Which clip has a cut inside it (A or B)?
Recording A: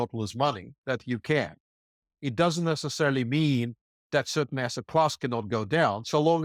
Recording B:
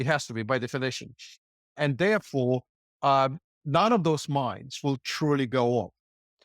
B